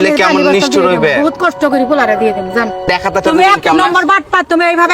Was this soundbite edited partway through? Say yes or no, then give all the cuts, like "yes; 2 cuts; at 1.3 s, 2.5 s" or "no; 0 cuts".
yes; 1 cut; at 2.9 s